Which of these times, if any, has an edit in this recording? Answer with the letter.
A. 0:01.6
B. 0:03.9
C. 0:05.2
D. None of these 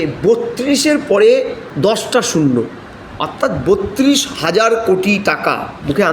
A